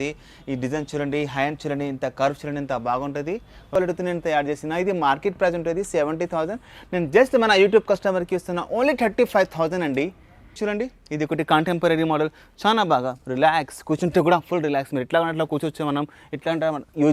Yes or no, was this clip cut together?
yes